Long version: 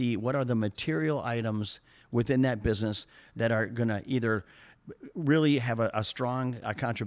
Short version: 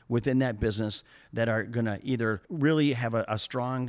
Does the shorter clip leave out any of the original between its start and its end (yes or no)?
yes